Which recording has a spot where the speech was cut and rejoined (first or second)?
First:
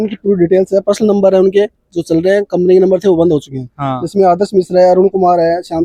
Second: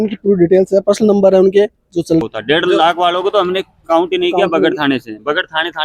second